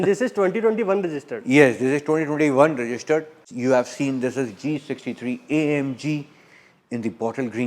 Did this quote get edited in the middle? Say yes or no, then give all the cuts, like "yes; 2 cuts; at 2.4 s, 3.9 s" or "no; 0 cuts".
yes; 1 cut; at 3.4 s